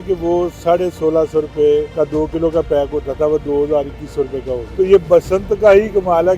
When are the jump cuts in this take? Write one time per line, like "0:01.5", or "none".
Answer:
0:01.9
0:04.6